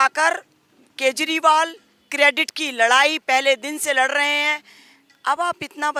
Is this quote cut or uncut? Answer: uncut